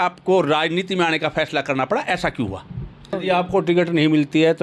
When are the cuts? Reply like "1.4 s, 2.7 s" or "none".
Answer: 3.2 s